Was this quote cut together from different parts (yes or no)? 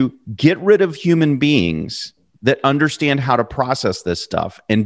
no